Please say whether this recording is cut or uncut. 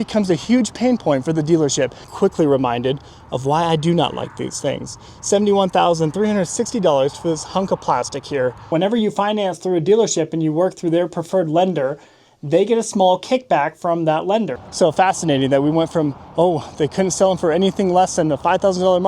cut